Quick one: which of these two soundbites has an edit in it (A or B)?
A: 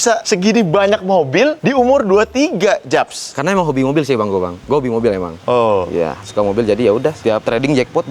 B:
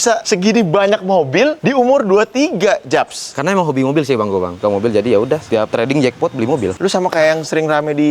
B